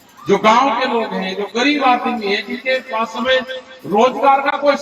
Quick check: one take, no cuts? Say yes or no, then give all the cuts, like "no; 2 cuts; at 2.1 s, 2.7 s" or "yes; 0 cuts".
yes; 0 cuts